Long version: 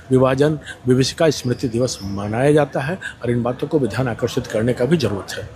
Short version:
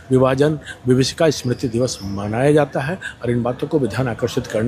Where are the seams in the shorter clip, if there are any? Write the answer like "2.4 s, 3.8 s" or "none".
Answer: none